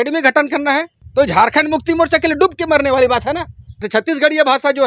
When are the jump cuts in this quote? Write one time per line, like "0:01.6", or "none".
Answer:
0:01.0
0:03.9